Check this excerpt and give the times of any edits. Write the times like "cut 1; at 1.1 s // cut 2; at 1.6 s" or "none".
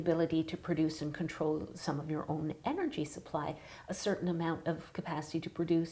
none